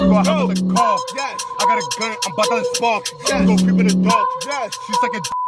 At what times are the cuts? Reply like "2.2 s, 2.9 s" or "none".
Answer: none